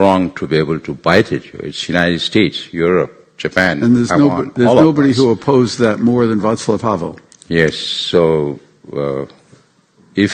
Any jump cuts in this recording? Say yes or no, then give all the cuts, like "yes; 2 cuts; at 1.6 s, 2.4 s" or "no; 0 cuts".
no; 0 cuts